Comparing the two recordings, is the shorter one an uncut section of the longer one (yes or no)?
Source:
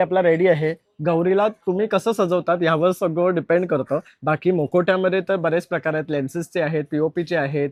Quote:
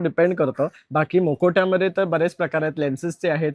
yes